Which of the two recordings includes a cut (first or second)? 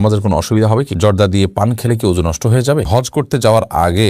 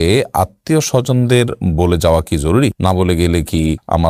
first